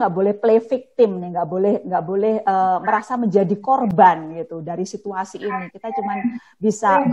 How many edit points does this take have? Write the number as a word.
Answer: zero